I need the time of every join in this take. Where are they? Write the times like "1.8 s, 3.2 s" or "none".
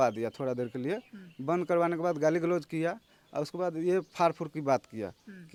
none